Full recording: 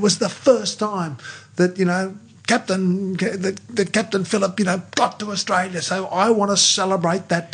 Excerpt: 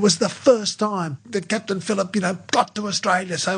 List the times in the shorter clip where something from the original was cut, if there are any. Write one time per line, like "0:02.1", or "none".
0:01.2